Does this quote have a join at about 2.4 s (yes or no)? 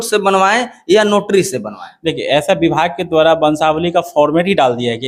no